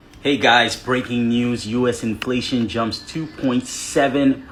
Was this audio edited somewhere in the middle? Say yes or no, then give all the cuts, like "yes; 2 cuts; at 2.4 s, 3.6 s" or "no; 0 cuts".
no; 0 cuts